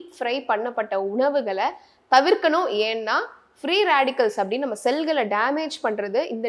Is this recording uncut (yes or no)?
yes